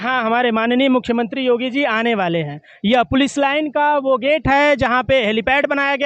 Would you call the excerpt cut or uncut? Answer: uncut